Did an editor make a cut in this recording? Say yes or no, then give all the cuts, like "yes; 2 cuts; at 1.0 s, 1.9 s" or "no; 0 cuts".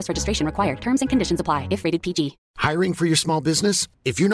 yes; 1 cut; at 2.4 s